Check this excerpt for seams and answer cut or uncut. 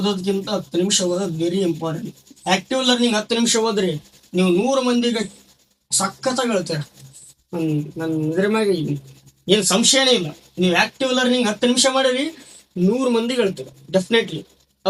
uncut